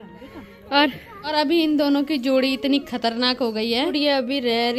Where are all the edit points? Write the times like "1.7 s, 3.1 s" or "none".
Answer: 1.3 s, 3.9 s